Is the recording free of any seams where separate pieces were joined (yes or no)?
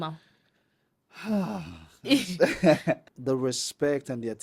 no